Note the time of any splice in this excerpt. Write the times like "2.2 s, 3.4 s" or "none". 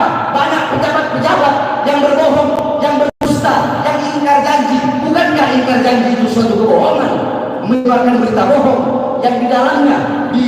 none